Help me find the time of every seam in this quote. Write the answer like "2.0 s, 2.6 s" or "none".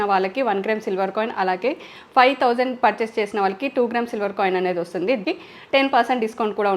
5.2 s